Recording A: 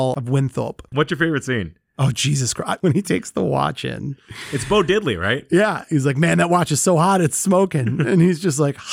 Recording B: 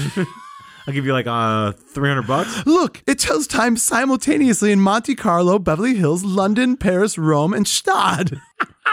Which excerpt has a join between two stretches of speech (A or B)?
A